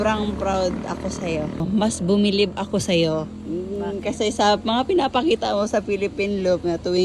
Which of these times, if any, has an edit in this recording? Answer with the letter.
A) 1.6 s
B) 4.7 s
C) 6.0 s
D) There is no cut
A